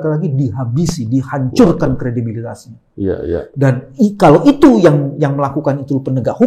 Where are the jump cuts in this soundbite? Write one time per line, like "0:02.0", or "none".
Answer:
none